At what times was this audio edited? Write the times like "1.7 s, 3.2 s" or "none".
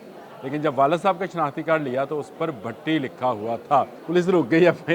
4.0 s